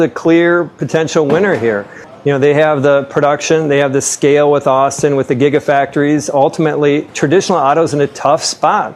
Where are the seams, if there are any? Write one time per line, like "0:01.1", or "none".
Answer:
none